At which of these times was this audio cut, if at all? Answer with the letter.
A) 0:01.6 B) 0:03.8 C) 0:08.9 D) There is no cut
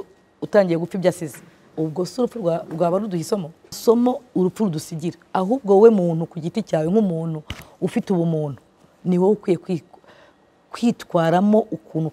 B